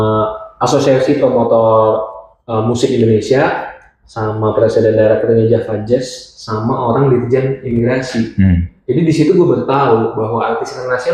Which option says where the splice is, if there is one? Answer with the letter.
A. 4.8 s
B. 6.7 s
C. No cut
C